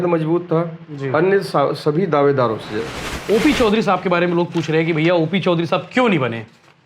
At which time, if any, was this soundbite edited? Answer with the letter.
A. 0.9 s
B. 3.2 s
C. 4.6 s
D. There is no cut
B